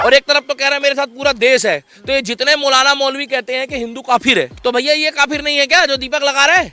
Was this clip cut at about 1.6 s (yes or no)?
no